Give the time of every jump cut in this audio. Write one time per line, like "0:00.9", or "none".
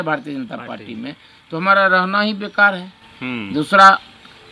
none